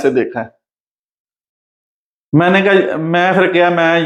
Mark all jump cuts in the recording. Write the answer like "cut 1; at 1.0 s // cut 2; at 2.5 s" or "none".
none